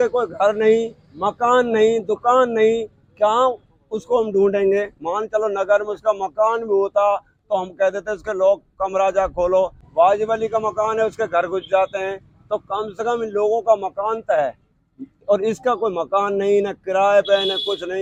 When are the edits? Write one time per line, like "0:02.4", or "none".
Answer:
none